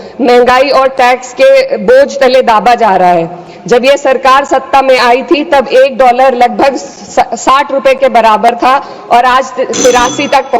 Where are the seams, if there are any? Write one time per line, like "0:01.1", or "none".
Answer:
none